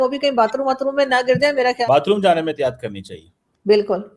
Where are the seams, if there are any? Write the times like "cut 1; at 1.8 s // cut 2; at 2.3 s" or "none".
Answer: cut 1; at 1.8 s